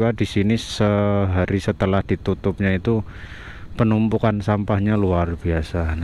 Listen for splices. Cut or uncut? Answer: uncut